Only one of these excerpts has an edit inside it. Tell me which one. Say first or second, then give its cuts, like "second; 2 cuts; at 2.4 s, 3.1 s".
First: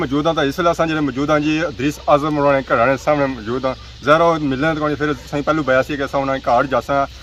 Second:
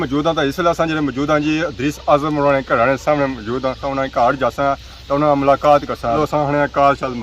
second; 2 cuts; at 3.8 s, 6.2 s